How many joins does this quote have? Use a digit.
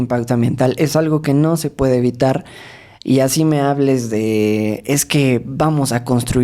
0